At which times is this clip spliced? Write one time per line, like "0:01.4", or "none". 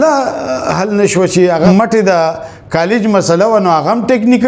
0:01.5